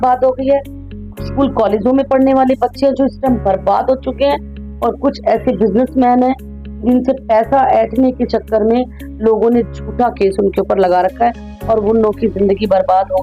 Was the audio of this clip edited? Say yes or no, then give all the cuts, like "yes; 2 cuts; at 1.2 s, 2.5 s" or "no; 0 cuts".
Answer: no; 0 cuts